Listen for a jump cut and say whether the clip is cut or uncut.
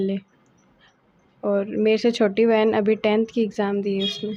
uncut